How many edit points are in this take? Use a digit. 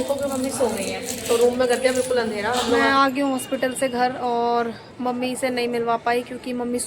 1